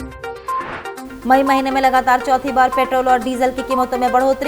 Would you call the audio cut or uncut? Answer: uncut